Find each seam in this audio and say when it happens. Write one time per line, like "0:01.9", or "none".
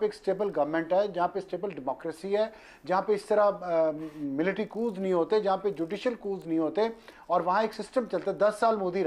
none